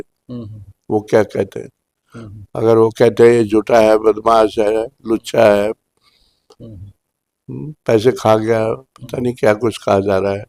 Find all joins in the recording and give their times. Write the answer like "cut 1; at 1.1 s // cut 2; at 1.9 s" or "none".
none

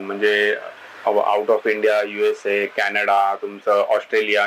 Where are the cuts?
none

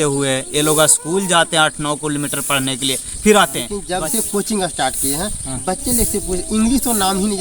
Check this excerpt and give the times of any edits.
cut 1; at 3.8 s

